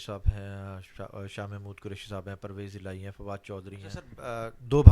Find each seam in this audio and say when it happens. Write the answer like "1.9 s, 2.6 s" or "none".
3.9 s